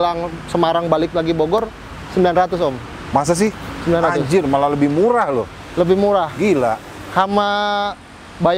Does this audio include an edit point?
no; 0 cuts

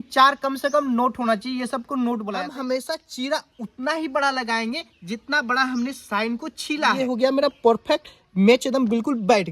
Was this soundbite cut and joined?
yes; 2 cuts; at 2.4 s, 7.0 s

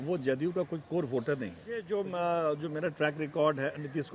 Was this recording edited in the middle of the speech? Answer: yes; 1 cut; at 1.9 s

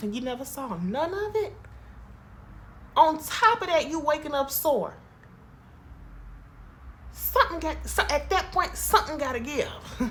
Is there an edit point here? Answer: no; 0 cuts

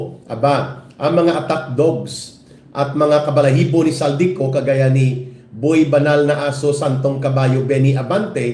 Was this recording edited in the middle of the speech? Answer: no; 0 cuts

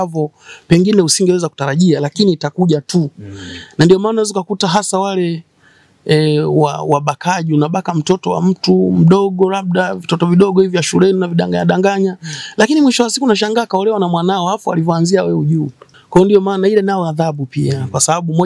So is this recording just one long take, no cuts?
no; 1 cut; at 15.8 s

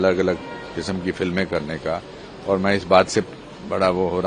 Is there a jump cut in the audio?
no; 0 cuts

